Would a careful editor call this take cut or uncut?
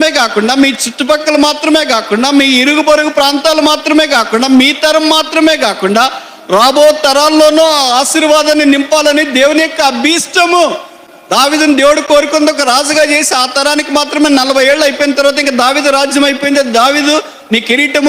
uncut